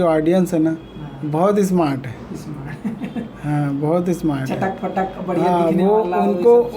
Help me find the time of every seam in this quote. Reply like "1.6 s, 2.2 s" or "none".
none